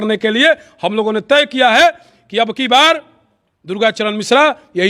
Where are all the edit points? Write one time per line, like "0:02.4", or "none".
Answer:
none